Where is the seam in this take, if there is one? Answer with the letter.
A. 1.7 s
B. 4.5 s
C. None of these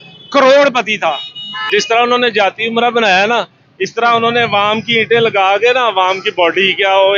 A